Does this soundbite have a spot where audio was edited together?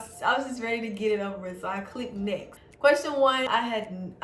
yes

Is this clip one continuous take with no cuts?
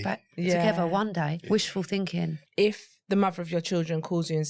no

